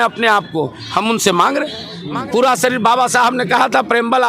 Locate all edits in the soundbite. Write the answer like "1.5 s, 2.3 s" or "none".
2.0 s